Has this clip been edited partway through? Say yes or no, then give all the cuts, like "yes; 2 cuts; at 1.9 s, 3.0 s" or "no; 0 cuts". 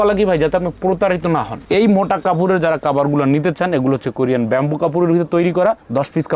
yes; 1 cut; at 1.6 s